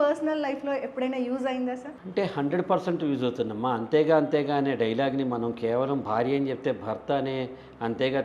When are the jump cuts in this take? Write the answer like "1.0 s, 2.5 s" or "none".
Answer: 1.9 s